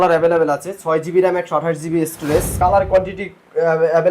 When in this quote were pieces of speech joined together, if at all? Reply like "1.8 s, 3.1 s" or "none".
2.5 s

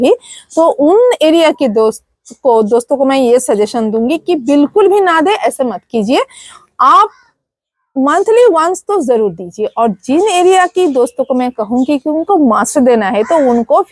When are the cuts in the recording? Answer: none

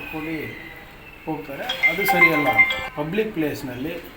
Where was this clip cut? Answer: 2.8 s

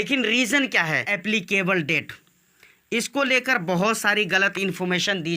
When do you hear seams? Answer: 1.1 s

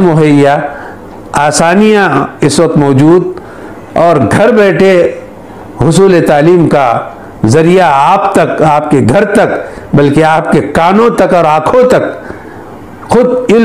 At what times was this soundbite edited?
none

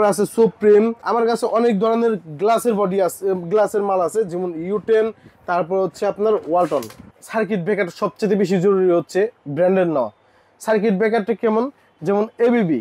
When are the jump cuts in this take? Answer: 1.0 s, 7.1 s

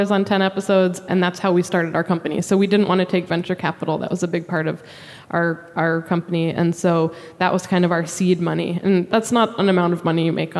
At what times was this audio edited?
1.0 s, 9.1 s

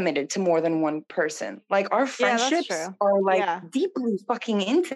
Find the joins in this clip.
1.1 s

